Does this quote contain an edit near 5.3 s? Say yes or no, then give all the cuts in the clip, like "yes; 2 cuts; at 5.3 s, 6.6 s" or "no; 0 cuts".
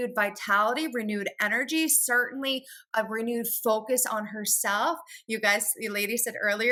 no; 0 cuts